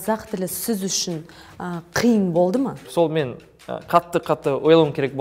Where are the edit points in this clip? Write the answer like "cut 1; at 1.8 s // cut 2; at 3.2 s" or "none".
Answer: cut 1; at 2.9 s